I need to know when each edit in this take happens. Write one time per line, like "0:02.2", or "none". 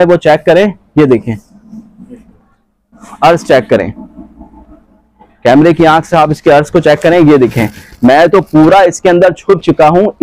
none